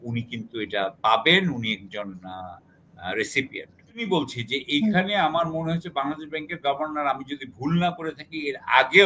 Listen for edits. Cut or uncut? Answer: cut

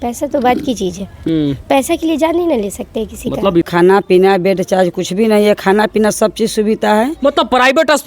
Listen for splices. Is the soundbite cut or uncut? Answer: cut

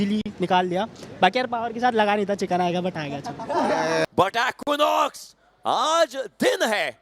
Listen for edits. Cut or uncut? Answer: cut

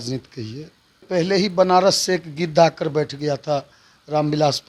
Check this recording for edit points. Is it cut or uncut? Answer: cut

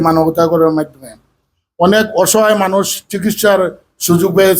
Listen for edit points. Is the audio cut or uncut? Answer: uncut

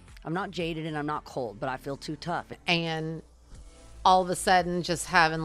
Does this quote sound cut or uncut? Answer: cut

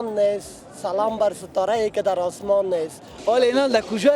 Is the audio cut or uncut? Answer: cut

